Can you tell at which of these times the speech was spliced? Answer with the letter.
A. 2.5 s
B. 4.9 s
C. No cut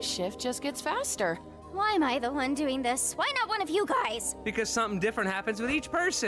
A